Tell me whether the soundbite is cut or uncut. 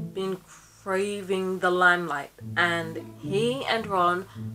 cut